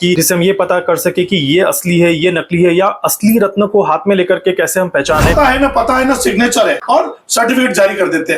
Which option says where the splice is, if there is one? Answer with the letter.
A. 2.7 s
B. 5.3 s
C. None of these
B